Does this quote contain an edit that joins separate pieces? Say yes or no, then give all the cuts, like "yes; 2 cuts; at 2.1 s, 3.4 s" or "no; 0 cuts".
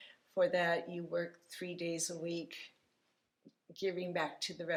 no; 0 cuts